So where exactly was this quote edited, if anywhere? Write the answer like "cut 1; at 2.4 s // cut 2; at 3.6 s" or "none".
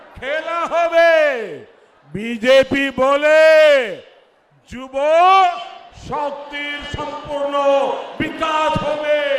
none